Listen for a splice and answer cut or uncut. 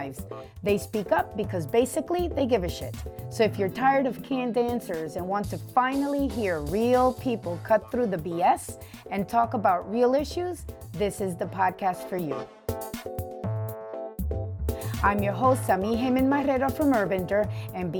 uncut